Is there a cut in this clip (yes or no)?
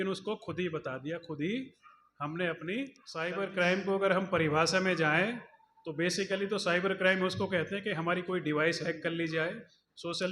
yes